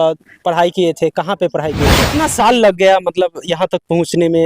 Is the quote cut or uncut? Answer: cut